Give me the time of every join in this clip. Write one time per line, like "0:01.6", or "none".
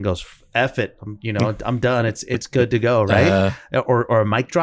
none